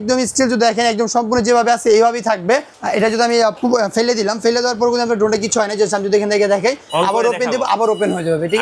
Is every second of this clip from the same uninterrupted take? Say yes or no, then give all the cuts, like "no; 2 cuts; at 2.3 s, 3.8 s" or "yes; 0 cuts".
no; 1 cut; at 2.8 s